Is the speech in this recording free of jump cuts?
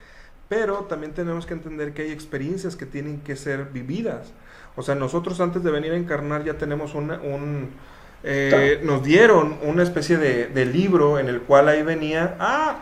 yes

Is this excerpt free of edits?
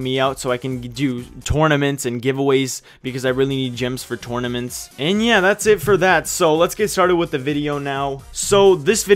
yes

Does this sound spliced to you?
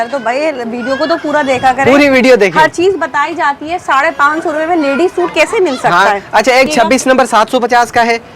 yes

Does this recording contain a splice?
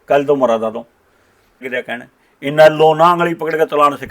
yes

